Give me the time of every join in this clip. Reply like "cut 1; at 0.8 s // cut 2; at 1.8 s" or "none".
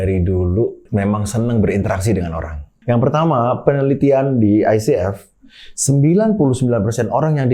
cut 1; at 0.8 s // cut 2; at 2.7 s